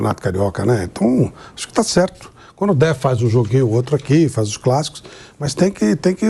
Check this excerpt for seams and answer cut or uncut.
uncut